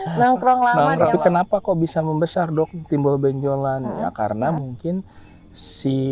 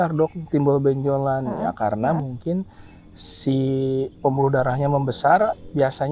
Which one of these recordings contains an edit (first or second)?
first